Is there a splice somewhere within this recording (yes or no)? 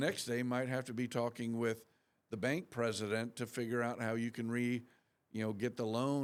no